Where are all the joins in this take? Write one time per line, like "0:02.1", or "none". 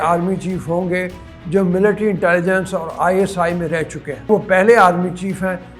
0:04.3